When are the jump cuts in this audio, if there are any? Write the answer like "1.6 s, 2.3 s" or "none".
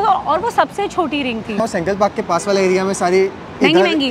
1.6 s